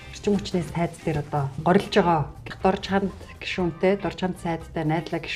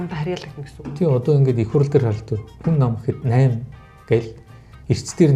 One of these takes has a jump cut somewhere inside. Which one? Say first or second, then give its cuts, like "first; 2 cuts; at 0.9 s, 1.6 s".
first; 1 cut; at 2.5 s